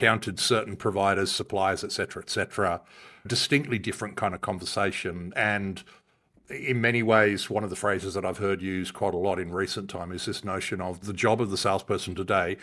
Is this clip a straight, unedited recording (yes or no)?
no